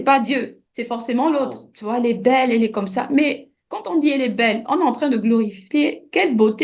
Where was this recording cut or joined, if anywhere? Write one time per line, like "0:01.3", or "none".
0:01.7

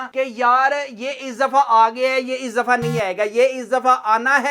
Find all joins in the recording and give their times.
none

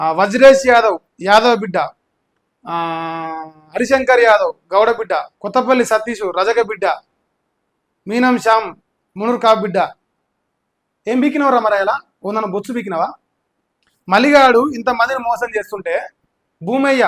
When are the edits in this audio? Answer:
none

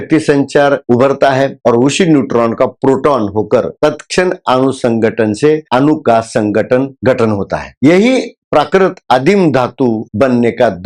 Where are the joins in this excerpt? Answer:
none

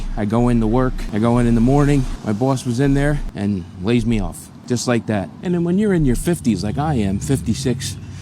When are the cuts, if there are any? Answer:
0:01.0
0:02.1
0:04.5
0:05.3

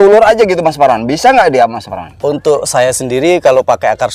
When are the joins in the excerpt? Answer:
none

